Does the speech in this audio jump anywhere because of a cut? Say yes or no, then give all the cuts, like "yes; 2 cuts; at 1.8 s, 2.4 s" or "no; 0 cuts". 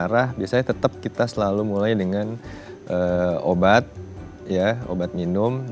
no; 0 cuts